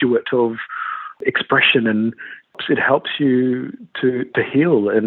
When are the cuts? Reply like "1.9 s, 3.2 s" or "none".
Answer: 1.2 s, 2.6 s